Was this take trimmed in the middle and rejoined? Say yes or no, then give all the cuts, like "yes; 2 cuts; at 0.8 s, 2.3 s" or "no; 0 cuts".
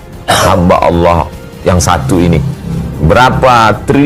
no; 0 cuts